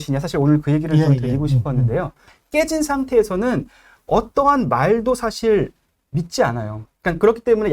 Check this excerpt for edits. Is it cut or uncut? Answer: cut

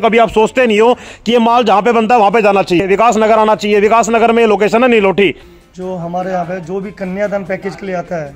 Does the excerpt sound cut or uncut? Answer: cut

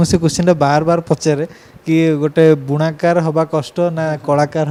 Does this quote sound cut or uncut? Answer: uncut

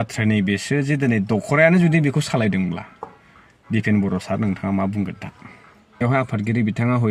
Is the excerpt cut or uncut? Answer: cut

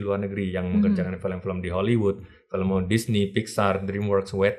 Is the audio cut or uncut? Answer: uncut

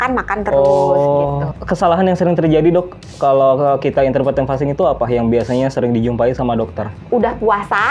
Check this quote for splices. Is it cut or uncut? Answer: cut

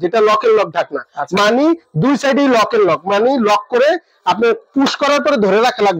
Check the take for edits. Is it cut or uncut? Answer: uncut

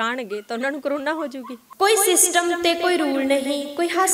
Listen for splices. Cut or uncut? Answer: cut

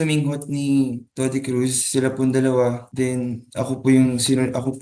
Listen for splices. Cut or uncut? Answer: cut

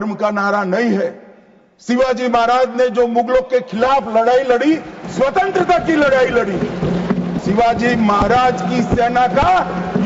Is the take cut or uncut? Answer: cut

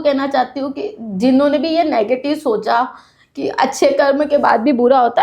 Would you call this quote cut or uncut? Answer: uncut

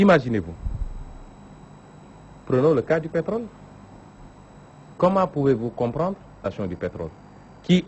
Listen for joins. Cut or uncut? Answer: uncut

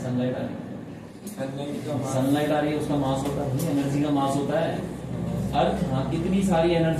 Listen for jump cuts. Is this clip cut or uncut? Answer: uncut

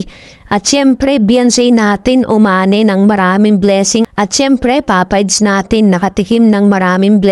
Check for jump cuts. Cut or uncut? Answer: cut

